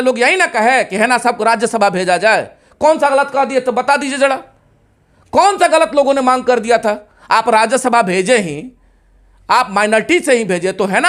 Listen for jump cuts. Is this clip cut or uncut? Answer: uncut